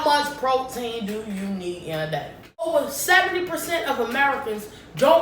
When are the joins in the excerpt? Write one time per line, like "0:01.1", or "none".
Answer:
0:02.7